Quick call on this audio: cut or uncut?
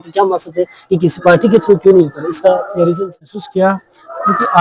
cut